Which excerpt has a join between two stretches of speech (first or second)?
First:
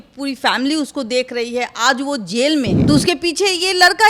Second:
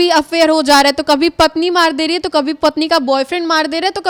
first